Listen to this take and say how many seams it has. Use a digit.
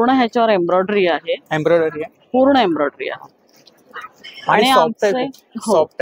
0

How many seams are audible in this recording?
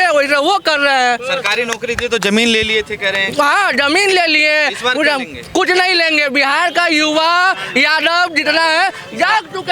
0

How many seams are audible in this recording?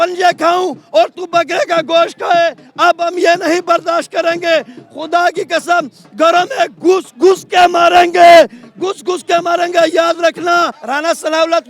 1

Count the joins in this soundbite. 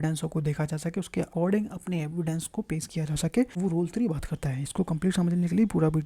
2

